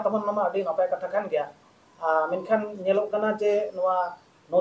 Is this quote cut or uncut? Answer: uncut